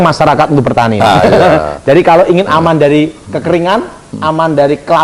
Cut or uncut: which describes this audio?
cut